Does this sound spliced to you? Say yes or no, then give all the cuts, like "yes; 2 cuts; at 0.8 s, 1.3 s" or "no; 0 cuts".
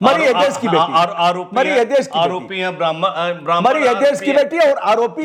no; 0 cuts